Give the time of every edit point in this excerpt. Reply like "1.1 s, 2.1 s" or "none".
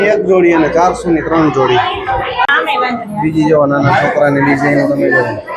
2.5 s